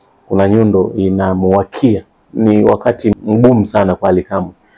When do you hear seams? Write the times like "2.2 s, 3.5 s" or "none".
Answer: 2.2 s, 3.1 s